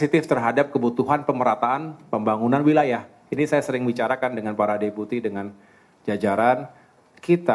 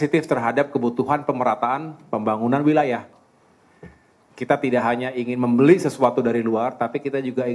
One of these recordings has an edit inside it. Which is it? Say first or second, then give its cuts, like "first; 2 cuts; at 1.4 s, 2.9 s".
second; 1 cut; at 3.2 s